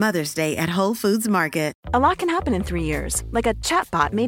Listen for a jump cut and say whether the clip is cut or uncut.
cut